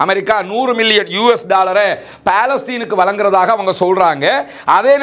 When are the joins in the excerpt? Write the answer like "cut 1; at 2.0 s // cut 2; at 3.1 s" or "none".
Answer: none